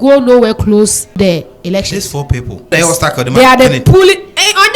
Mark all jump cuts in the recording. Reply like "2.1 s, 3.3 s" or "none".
1.2 s, 2.7 s